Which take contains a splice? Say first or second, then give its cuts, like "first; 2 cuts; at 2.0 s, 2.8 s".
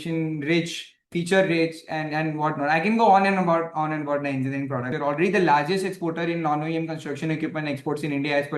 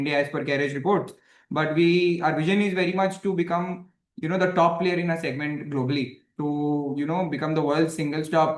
first; 2 cuts; at 1.0 s, 4.9 s